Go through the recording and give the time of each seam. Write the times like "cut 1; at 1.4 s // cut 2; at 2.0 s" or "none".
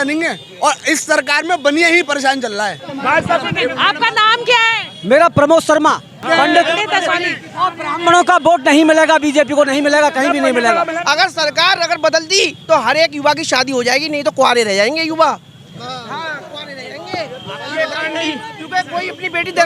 cut 1; at 2.9 s // cut 2; at 11.0 s